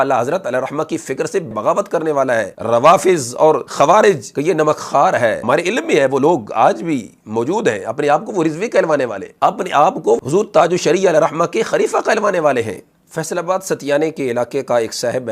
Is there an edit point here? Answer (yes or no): yes